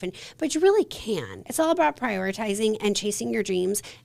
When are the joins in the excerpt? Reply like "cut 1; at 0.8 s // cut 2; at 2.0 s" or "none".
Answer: cut 1; at 1.4 s